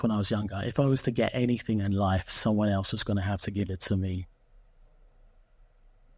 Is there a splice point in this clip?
no; 0 cuts

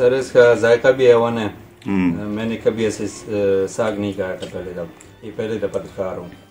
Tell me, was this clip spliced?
no; 0 cuts

